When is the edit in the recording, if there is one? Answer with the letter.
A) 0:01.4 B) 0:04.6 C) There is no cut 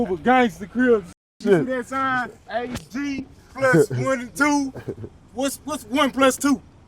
A